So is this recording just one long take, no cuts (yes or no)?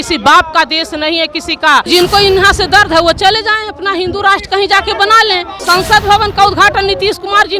no